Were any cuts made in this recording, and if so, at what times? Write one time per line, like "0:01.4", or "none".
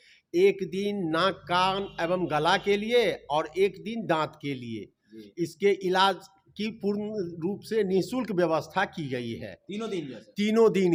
none

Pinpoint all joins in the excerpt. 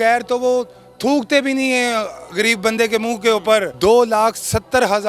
0:03.7

